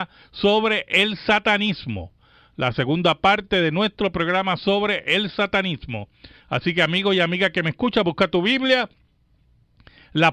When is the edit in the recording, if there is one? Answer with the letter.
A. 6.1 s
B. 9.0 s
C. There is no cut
B